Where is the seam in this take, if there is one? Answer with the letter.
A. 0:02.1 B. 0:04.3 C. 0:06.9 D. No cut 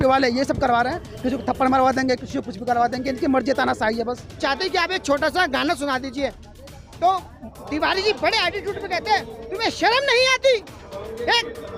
B